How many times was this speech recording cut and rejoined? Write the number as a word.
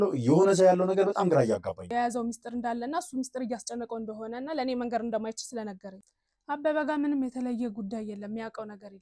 two